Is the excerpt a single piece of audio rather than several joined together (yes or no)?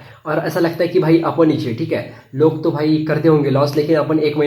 yes